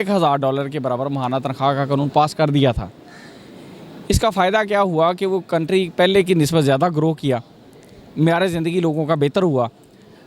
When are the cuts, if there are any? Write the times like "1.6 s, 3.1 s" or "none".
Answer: none